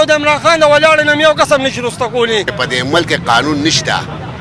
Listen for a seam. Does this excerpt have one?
yes; 1 cut; at 2.6 s

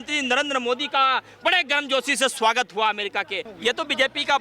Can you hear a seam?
yes; 1 cut; at 3.5 s

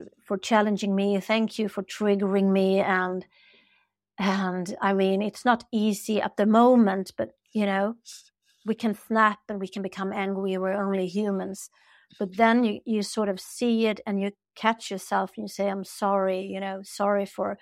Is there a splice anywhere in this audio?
no; 0 cuts

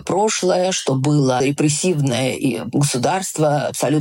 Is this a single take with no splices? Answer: no; 1 cut; at 1.4 s

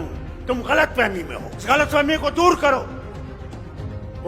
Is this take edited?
yes; 1 cut; at 1.6 s

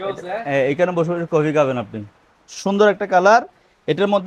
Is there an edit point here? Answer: no; 0 cuts

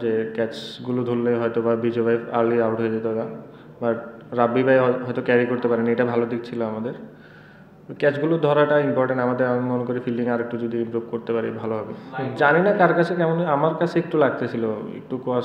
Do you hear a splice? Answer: yes; 1 cut; at 12.0 s

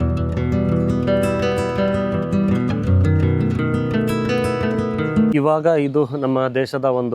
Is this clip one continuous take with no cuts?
no; 1 cut; at 5.3 s

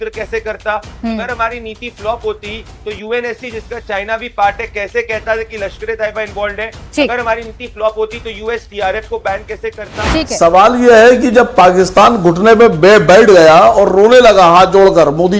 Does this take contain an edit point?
yes; 1 cut; at 10.0 s

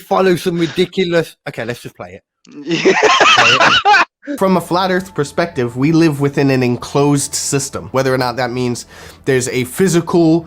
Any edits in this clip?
yes; 1 cut; at 4.2 s

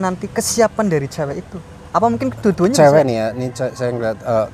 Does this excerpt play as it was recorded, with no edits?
yes; 0 cuts

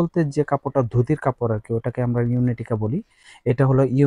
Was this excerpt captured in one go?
yes; 0 cuts

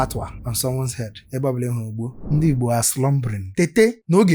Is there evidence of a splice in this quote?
yes; 2 cuts; at 2.2 s, 3.5 s

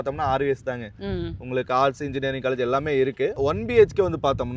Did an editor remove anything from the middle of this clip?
yes; 1 cut; at 3.4 s

